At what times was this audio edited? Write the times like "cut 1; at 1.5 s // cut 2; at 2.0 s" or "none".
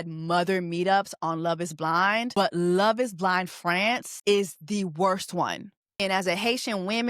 cut 1; at 2.3 s // cut 2; at 4.1 s // cut 3; at 6.0 s